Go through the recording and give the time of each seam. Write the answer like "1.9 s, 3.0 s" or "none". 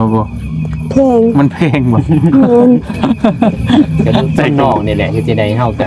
4.5 s